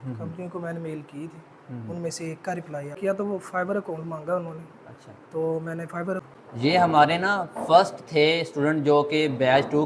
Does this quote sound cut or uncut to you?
cut